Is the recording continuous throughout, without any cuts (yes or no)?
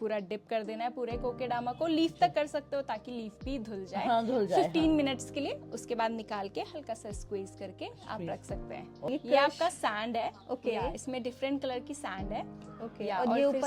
no